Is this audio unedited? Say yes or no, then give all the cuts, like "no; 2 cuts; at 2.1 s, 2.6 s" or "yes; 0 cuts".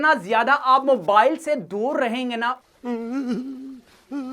no; 1 cut; at 2.6 s